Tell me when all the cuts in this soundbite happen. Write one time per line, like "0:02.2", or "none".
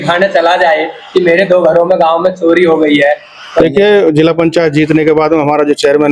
0:03.6